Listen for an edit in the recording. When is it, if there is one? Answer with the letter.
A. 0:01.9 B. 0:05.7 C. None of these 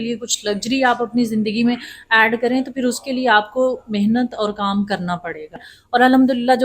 B